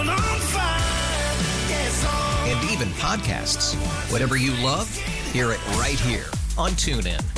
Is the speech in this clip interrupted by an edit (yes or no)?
no